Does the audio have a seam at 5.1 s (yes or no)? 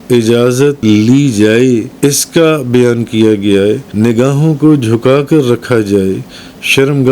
no